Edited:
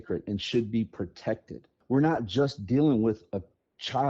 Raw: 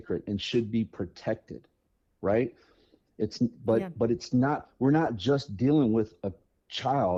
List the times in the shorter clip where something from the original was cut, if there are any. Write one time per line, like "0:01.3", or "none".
0:01.8